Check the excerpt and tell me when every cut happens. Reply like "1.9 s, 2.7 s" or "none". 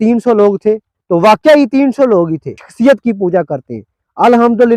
0.9 s, 2.6 s